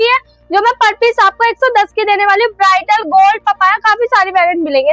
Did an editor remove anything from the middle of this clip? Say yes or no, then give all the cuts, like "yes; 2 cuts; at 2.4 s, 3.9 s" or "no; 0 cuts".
no; 0 cuts